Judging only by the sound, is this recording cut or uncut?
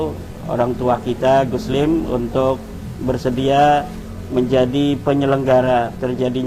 uncut